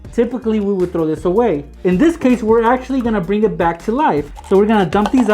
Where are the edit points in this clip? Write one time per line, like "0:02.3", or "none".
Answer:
0:04.3